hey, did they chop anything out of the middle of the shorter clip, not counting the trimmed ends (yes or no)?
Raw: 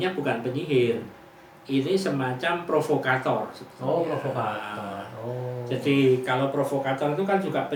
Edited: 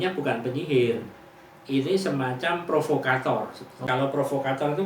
yes